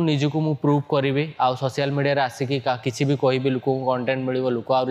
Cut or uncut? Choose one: uncut